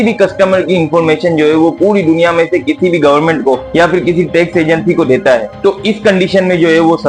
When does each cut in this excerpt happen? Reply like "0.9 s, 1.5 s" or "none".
none